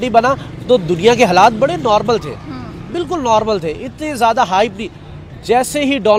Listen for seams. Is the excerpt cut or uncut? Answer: uncut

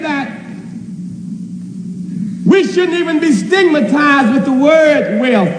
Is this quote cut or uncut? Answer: uncut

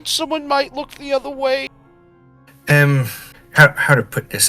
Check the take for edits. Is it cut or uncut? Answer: cut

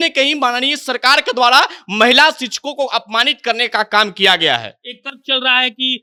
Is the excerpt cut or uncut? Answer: uncut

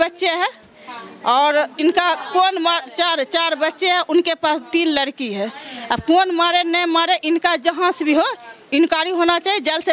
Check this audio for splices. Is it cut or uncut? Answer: uncut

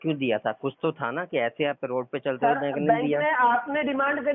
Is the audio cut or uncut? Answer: uncut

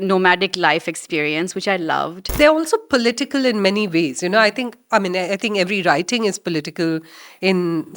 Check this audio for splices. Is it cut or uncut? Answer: cut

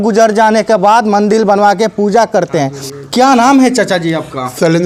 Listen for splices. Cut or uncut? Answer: uncut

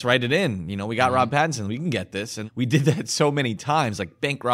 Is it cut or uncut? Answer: uncut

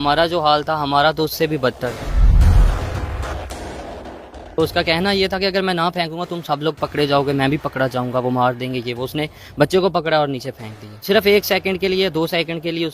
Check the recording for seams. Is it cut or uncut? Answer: cut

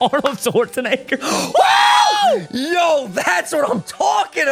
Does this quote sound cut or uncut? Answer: uncut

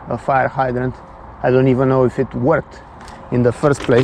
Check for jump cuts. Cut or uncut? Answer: uncut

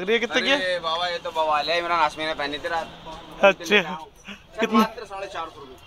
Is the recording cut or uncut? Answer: uncut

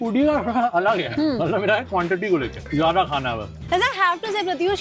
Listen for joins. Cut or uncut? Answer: cut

